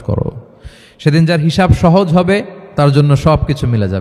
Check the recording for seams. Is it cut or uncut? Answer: cut